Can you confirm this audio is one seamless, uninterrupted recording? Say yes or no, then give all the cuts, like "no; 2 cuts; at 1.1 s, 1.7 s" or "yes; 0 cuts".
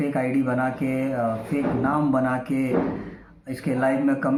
yes; 0 cuts